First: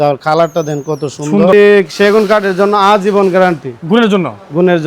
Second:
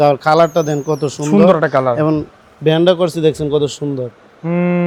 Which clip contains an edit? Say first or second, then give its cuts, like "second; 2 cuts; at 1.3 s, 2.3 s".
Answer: first; 1 cut; at 1.5 s